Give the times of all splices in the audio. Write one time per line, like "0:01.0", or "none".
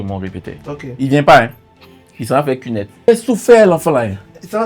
0:03.1

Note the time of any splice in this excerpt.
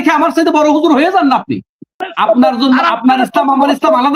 0:02.1

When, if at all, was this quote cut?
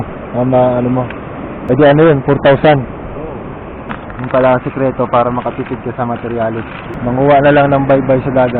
0:01.6
0:04.1
0:06.9

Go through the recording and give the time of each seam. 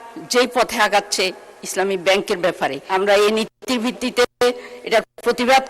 0:02.8

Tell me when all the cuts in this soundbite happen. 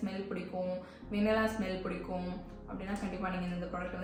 none

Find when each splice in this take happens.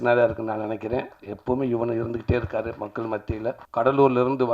0:03.6

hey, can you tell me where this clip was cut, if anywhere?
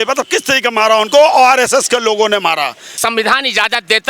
0:03.0

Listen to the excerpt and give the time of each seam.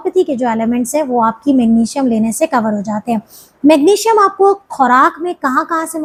none

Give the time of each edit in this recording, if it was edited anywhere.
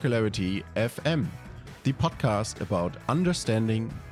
none

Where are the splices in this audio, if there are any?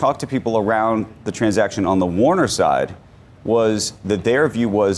none

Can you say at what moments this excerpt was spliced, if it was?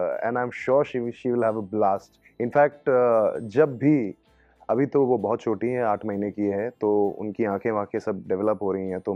none

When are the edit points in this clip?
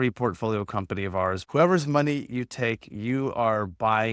0:01.4

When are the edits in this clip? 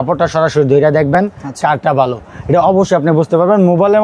none

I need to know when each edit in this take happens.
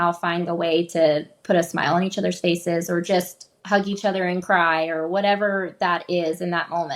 none

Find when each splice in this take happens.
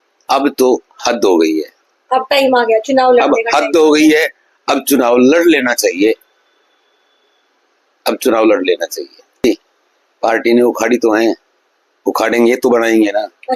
0:09.4

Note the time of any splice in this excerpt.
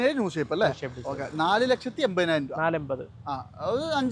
none

